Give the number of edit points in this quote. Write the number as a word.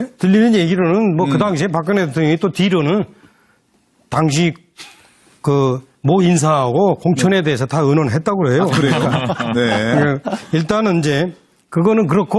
zero